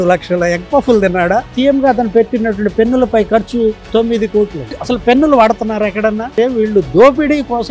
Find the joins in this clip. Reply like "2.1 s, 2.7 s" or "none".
1.5 s, 3.8 s, 4.7 s, 6.3 s

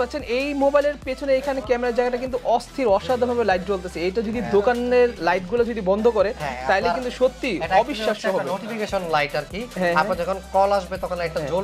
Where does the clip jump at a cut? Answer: none

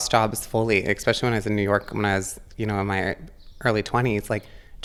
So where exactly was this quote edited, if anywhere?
none

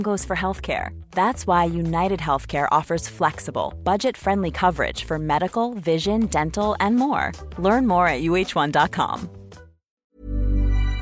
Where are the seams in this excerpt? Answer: 10.0 s

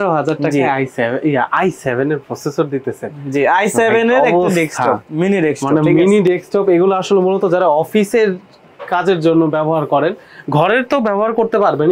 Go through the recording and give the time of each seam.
none

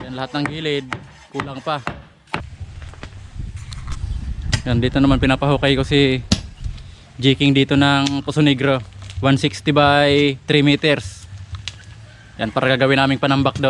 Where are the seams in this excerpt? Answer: 2.5 s

